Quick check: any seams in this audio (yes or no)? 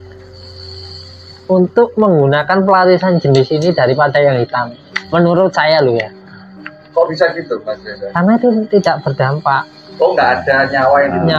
no